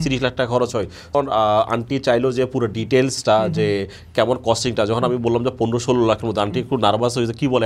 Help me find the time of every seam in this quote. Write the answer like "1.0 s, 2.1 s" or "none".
1.1 s